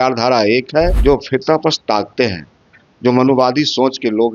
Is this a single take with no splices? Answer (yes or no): no